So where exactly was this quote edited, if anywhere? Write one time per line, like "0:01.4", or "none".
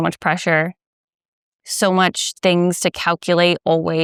none